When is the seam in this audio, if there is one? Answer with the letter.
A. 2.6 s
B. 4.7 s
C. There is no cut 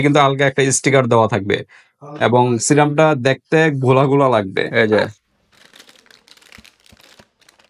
B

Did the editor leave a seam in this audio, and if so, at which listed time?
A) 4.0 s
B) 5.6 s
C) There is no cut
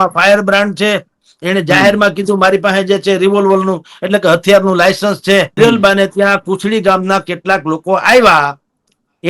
B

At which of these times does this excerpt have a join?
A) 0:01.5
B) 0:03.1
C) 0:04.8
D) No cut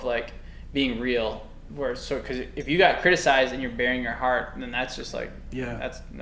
D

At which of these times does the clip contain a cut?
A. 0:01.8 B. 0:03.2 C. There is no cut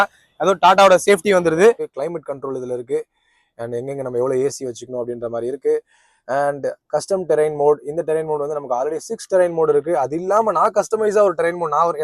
A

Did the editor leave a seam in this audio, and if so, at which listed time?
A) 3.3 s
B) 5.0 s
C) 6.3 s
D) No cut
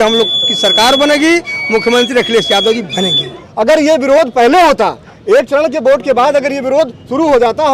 A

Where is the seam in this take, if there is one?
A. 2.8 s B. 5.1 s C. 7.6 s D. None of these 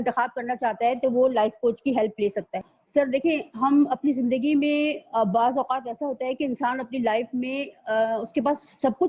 D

